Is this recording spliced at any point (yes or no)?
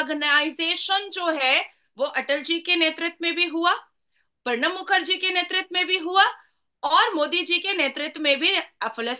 no